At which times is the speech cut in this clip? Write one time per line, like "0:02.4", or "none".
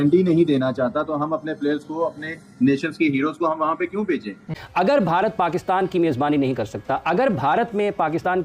0:04.6